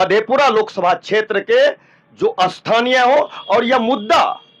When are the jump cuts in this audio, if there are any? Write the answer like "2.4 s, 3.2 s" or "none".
none